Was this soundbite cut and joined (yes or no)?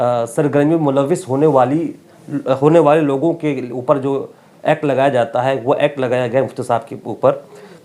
no